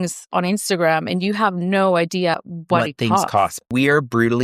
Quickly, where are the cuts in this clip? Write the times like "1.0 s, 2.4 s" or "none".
2.4 s, 3.7 s